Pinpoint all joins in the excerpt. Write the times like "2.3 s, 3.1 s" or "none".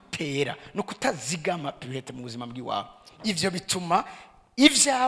none